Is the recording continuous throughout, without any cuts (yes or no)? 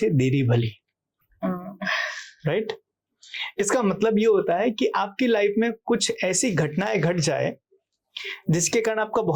yes